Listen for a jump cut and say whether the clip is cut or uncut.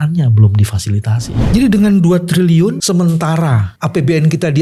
cut